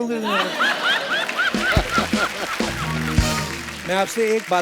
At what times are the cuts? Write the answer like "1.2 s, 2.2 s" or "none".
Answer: none

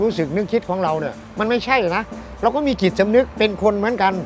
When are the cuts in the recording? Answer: none

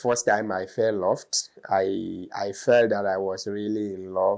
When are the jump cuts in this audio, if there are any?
none

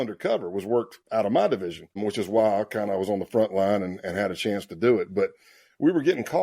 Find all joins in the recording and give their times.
1.0 s

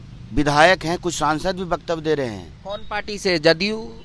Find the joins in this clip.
none

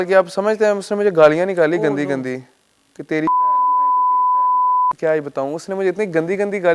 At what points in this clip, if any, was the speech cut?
5.0 s

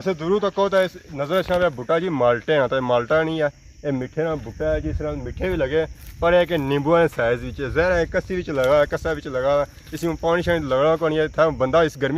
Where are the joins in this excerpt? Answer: none

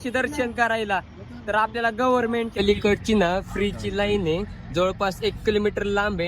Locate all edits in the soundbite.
2.5 s

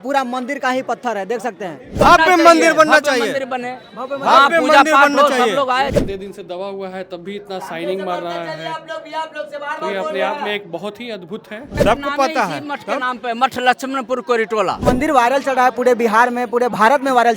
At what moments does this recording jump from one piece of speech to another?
2.0 s, 5.9 s, 11.7 s, 14.8 s

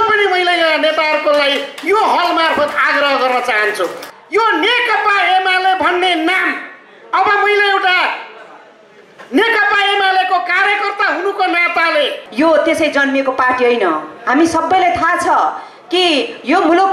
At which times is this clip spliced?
4.0 s, 12.2 s

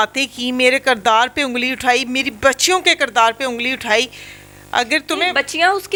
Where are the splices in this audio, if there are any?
none

